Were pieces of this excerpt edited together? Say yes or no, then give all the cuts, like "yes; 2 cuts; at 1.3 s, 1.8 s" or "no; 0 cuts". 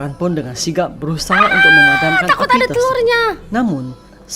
no; 0 cuts